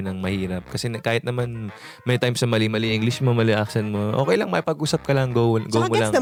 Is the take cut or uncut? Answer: uncut